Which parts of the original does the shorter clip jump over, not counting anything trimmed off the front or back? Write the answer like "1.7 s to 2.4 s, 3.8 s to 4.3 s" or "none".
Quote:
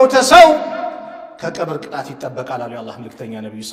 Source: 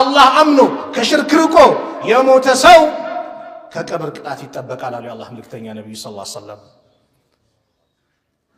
none